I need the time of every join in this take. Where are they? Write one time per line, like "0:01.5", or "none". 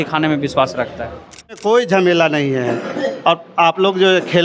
0:01.5